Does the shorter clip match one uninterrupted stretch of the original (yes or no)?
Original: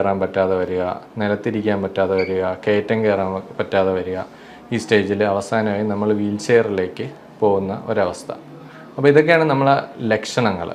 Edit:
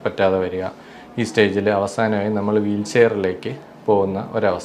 yes